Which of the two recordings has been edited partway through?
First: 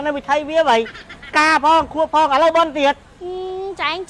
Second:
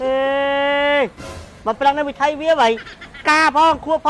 first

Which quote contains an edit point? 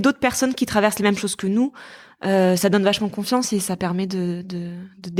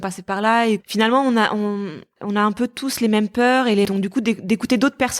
second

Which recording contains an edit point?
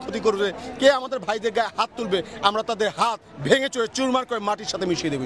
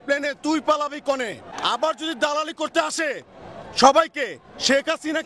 second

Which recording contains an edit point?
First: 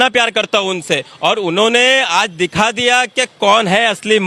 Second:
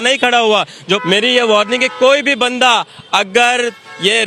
second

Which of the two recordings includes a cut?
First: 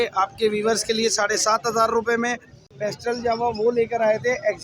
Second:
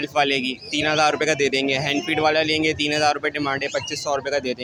first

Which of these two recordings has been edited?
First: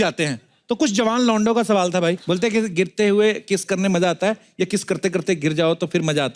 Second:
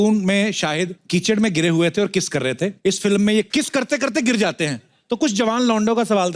second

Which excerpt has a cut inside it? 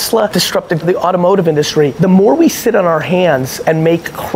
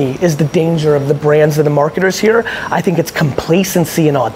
first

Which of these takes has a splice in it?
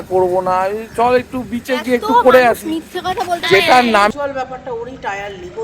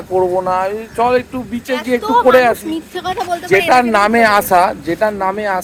first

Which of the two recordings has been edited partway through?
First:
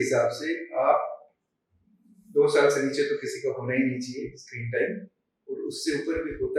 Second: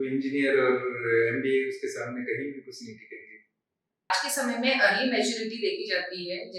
second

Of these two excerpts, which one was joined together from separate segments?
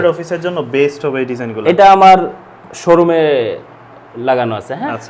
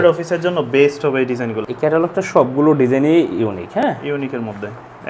second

